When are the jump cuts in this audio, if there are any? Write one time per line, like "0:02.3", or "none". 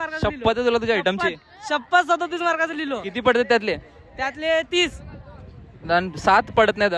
none